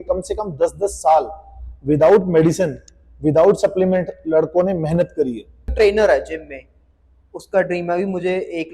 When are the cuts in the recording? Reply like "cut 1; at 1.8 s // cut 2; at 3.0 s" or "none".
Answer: cut 1; at 5.7 s